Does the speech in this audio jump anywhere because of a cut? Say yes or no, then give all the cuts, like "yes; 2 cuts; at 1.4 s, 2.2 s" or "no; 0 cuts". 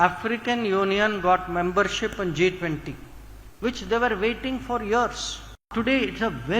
yes; 1 cut; at 5.7 s